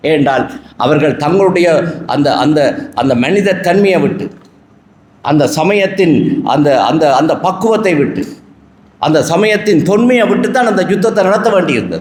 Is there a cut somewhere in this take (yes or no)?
no